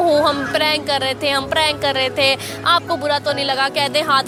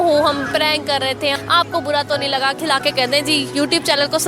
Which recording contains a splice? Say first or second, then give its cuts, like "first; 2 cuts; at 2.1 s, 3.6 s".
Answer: second; 2 cuts; at 1.4 s, 2.6 s